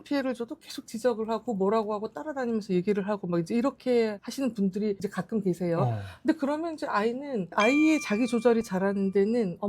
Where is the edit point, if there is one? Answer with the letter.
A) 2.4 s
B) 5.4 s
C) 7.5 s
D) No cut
C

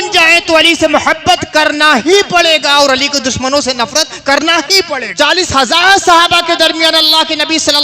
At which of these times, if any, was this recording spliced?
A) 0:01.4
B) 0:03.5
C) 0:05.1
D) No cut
C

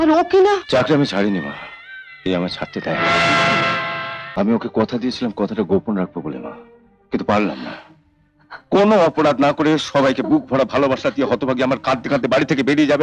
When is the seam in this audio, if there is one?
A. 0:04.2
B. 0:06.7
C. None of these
A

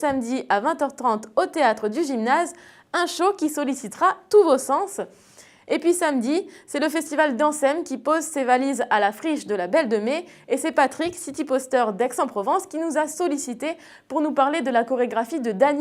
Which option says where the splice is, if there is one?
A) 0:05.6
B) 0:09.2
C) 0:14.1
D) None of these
A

